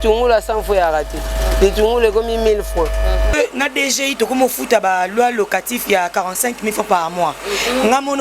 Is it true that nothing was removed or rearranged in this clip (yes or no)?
no